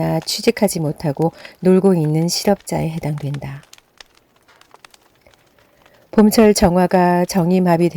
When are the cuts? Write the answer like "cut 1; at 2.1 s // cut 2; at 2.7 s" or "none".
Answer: cut 1; at 3.6 s // cut 2; at 6.0 s